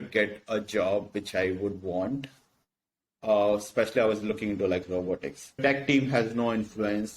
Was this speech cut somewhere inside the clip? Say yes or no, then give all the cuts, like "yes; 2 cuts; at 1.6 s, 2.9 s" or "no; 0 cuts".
yes; 1 cut; at 5.6 s